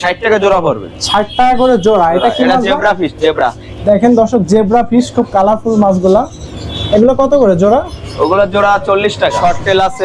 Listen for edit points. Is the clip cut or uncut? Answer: uncut